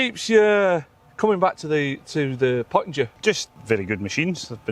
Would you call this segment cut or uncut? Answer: cut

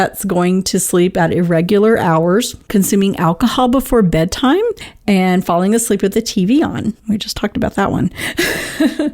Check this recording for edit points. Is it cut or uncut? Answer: cut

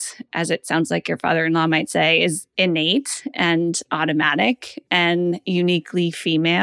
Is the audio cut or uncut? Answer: uncut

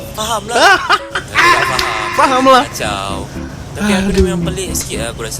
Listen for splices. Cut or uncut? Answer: uncut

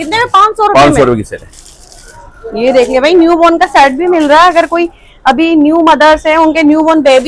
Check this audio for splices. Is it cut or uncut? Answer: uncut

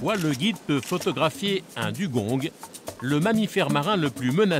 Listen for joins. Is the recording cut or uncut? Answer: uncut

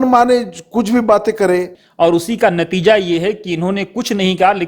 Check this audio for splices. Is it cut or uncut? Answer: cut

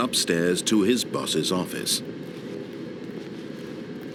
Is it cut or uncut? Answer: uncut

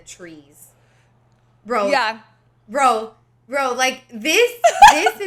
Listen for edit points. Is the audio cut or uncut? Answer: uncut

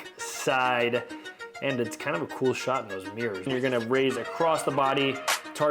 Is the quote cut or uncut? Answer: cut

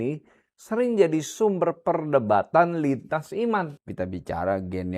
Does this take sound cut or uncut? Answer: cut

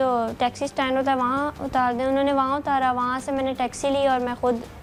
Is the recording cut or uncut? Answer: uncut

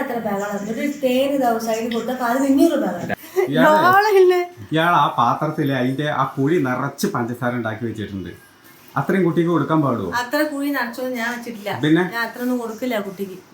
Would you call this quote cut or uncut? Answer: cut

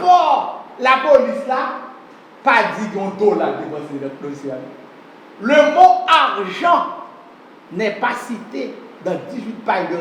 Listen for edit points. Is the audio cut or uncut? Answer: uncut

